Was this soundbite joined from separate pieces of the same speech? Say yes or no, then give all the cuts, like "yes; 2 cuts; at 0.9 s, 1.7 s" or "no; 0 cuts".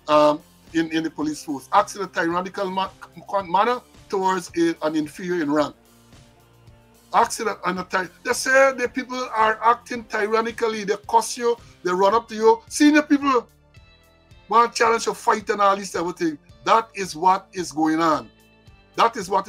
no; 0 cuts